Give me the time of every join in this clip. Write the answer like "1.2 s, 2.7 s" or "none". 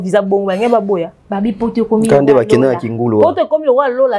none